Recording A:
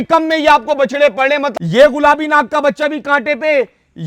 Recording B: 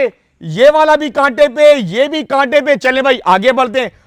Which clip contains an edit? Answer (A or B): A